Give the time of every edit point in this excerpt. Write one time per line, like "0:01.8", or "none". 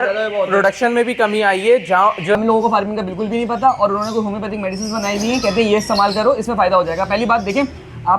0:02.4